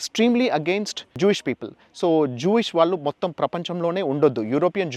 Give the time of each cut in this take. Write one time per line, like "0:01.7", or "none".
0:01.2